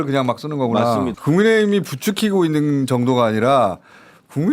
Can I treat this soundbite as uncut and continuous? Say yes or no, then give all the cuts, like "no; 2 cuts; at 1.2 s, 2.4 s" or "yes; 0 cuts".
no; 1 cut; at 1.2 s